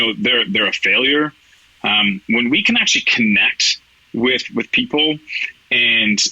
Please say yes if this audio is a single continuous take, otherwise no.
yes